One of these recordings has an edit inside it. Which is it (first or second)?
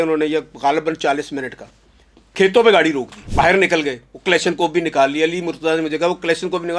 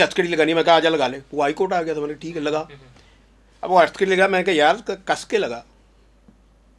first